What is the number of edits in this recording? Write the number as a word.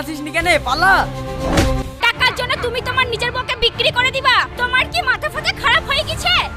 one